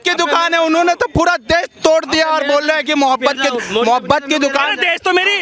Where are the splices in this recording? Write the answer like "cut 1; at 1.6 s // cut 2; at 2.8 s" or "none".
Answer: none